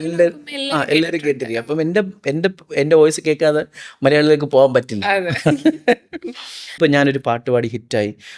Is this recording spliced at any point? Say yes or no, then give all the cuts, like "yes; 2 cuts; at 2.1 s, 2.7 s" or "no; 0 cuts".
yes; 1 cut; at 6.8 s